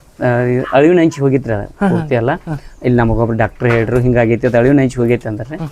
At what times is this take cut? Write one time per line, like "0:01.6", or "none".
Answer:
none